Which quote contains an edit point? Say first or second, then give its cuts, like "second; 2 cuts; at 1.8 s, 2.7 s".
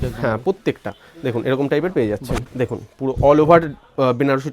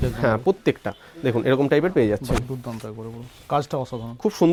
first; 1 cut; at 2.4 s